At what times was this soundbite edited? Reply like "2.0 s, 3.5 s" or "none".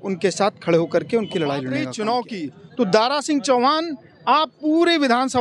1.8 s